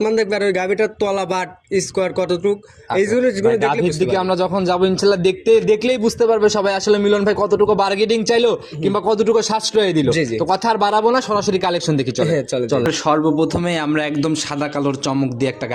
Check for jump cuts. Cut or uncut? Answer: uncut